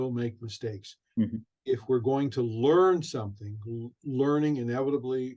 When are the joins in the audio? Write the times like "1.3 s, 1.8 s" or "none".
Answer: none

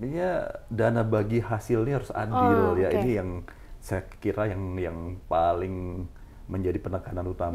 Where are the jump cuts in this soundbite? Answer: none

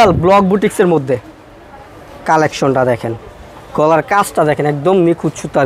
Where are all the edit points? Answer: none

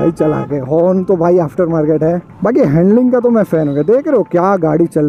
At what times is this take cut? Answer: 2.3 s

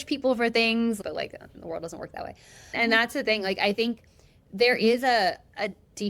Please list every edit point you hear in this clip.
1.0 s, 2.8 s

